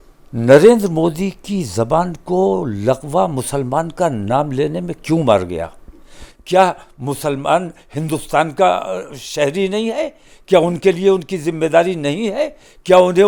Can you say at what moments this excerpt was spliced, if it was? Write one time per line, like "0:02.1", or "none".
none